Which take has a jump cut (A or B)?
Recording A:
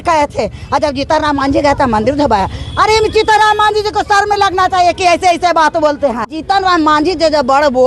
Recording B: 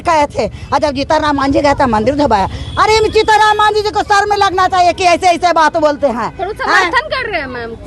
A